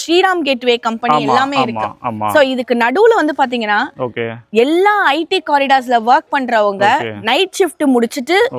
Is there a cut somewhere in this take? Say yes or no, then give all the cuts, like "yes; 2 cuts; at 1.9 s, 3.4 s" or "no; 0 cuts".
no; 0 cuts